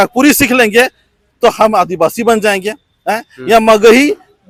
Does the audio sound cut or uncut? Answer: uncut